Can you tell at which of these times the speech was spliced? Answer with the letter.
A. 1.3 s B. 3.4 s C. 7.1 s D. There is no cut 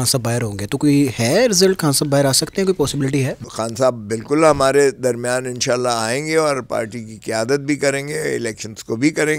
B